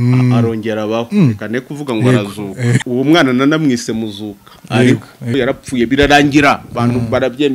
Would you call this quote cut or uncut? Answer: cut